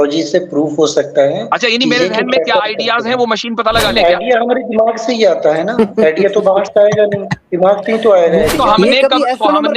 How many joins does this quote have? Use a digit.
2